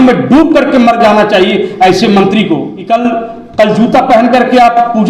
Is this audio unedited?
no; 1 cut; at 2.7 s

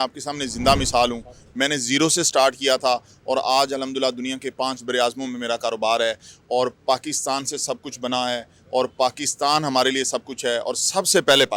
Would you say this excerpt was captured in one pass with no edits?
yes; 0 cuts

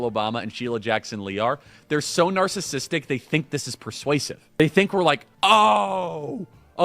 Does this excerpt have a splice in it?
yes; 2 cuts; at 4.6 s, 5.3 s

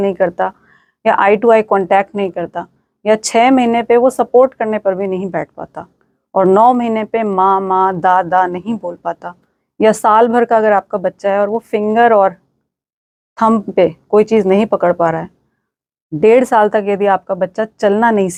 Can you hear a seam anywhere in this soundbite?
no; 0 cuts

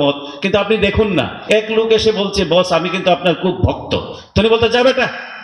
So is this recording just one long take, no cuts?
no; 1 cut; at 1.4 s

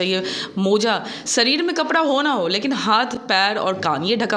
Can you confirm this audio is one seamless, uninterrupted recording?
yes; 0 cuts

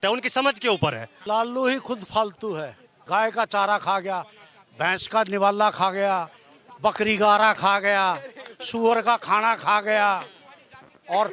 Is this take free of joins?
no; 2 cuts; at 1.1 s, 2.9 s

